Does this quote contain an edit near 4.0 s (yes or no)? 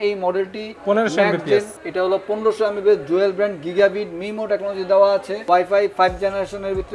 no